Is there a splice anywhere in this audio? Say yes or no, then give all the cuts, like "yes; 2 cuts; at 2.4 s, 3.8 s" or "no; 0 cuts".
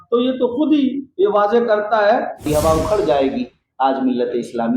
yes; 1 cut; at 2.5 s